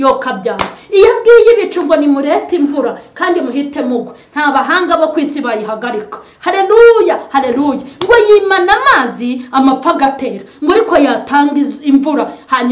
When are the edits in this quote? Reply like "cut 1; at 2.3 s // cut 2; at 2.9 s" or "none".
none